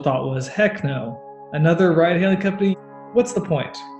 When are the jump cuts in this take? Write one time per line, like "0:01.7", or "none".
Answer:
0:02.7